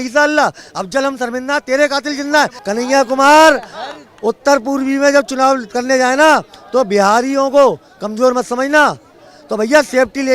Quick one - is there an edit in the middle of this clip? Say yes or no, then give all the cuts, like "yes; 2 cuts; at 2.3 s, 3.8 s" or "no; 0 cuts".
yes; 1 cut; at 2.6 s